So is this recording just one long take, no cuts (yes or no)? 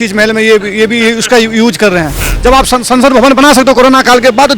no